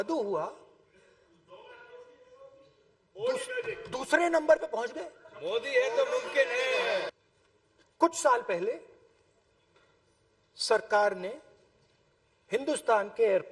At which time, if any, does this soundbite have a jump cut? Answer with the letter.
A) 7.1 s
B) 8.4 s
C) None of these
A